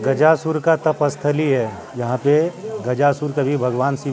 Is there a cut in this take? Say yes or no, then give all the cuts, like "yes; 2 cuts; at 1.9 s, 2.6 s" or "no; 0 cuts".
yes; 1 cut; at 1.9 s